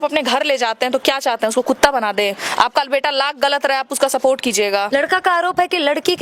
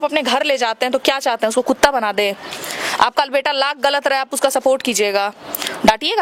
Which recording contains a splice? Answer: first; 2 cuts; at 2.4 s, 4.9 s

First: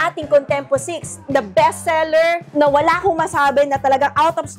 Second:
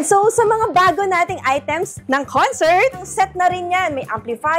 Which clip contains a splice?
second; 2 cuts; at 2.0 s, 3.1 s

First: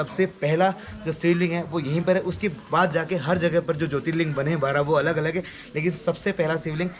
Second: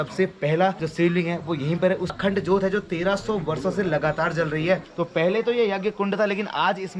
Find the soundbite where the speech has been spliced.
second; 3 cuts; at 0.8 s, 2.1 s, 4.9 s

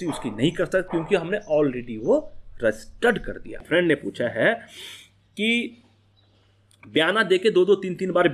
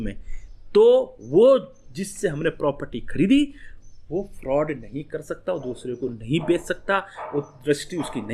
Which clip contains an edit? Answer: first; 1 cut; at 3.6 s

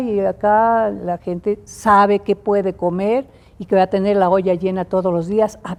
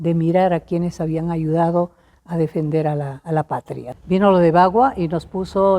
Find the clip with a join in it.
second; 1 cut; at 3.8 s

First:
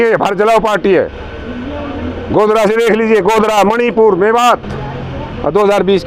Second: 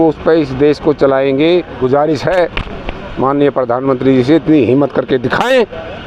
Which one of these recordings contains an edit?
second; 1 cut; at 1.8 s

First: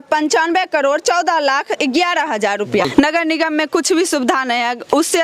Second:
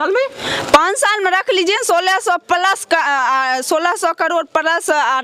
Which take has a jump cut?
first; 1 cut; at 2.9 s

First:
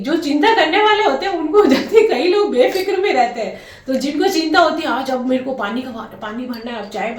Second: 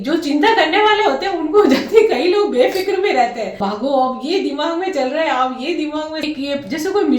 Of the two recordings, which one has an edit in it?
second; 2 cuts; at 3.6 s, 6.2 s

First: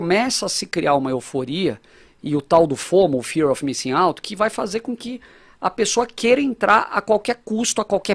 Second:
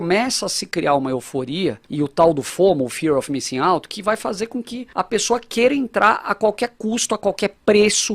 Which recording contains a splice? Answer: second; 2 cuts; at 1.8 s, 4.8 s

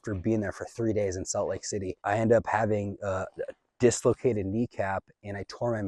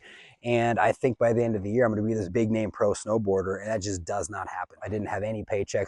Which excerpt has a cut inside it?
second; 2 cuts; at 2.3 s, 4.8 s

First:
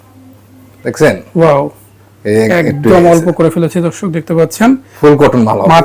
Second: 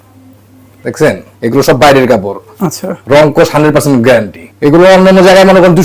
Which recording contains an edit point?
second; 2 cuts; at 1.2 s, 4.5 s

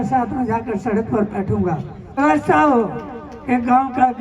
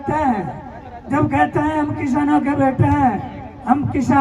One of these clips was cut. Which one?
first; 1 cut; at 2.2 s

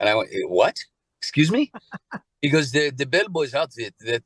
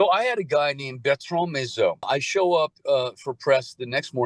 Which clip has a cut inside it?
second; 1 cut; at 2.1 s

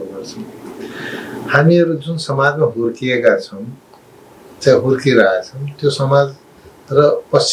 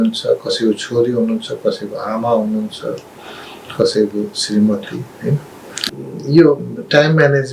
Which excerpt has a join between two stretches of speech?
second; 1 cut; at 5.7 s

